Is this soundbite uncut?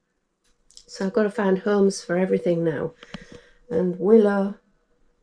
yes; 0 cuts

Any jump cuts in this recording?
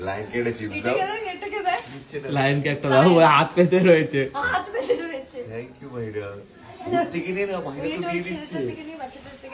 no; 0 cuts

